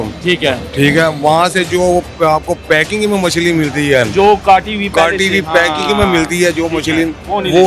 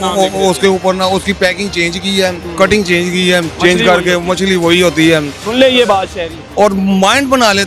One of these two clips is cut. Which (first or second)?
second